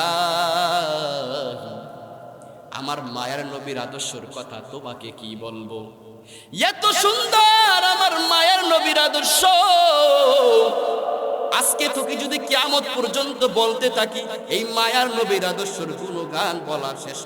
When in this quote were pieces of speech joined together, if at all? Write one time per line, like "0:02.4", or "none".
none